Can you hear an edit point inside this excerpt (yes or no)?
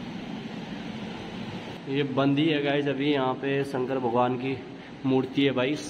yes